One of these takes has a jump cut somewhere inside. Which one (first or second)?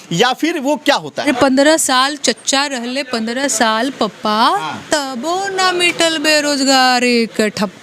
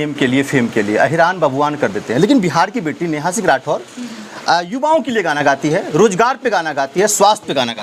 first